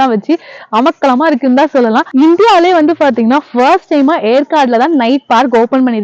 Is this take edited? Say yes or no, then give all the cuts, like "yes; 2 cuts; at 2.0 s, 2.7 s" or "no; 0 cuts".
yes; 1 cut; at 2.1 s